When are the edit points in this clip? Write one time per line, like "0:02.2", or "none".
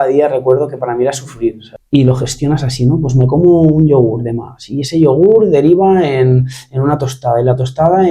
0:01.7